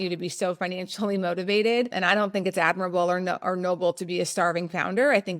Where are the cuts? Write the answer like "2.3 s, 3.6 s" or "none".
2.0 s